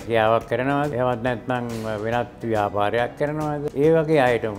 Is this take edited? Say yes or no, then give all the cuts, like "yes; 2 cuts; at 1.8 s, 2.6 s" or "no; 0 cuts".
yes; 2 cuts; at 0.9 s, 3.7 s